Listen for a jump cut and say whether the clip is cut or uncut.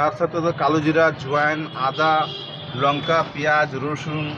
uncut